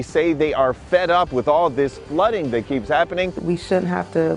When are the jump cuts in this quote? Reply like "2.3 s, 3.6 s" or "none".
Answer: 3.4 s

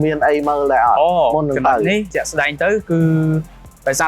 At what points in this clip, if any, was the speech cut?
2.1 s

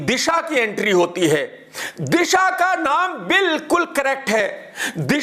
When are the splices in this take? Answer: none

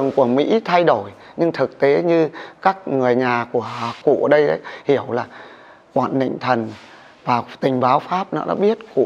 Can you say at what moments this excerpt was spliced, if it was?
4.0 s

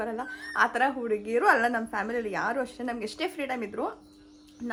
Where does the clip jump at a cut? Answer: none

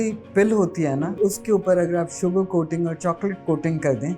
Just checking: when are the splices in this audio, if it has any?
1.1 s

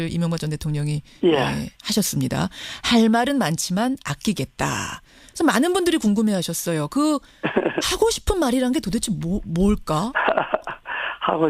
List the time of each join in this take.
6.4 s

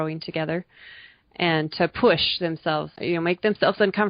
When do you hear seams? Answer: 3.0 s

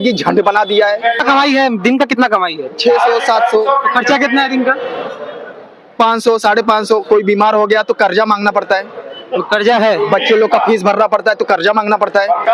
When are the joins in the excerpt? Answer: 1.2 s

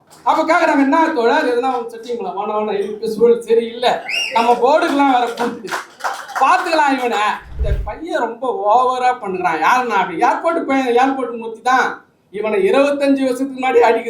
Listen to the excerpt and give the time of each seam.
7.5 s

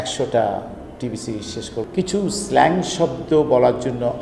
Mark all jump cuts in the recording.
1.8 s

